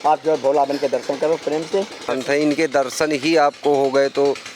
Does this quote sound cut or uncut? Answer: cut